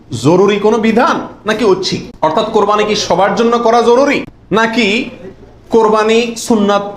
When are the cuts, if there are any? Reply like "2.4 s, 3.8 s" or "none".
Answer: 2.1 s, 4.6 s

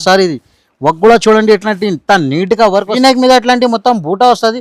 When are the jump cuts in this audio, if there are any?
3.0 s

